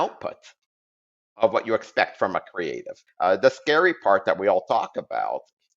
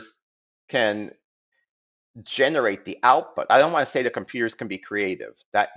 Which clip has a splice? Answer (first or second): first